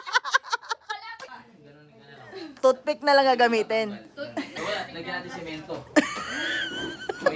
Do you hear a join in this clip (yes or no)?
yes